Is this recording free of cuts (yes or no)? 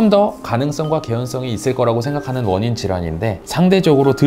yes